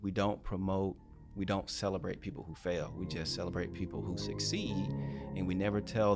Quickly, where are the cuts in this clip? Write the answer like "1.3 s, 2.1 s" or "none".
none